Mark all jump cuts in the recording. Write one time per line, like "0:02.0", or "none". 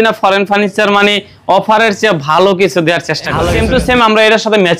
0:03.5